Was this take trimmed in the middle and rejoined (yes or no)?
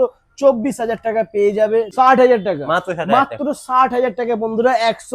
yes